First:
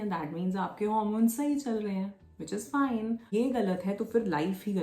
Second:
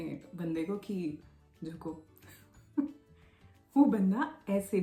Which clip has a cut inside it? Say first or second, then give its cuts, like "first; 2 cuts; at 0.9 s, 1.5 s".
first; 1 cut; at 3.3 s